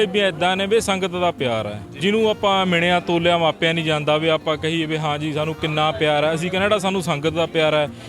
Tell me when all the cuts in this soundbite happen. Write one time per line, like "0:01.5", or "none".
0:02.0